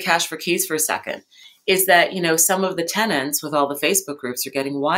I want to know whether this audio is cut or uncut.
uncut